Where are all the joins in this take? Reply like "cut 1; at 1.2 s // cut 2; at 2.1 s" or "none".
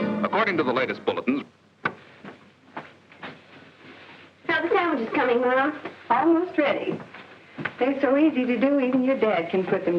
cut 1; at 3.4 s